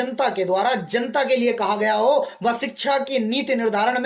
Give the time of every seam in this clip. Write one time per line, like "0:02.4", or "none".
none